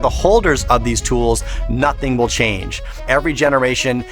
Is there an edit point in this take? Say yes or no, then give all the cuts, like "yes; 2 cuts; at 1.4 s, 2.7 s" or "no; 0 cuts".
yes; 1 cut; at 3.0 s